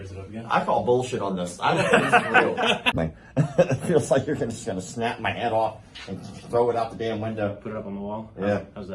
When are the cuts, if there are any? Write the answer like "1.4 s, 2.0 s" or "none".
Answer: 3.0 s